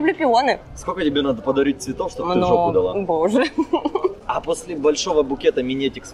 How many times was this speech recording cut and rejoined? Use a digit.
1